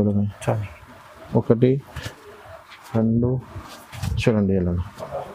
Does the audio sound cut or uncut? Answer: uncut